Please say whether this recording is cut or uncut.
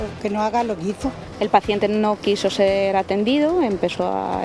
cut